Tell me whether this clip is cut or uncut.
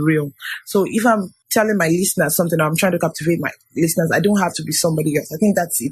cut